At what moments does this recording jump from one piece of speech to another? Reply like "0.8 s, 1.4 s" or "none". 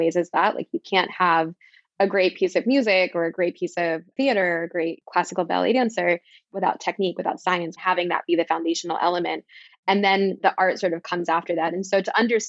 6.5 s, 7.8 s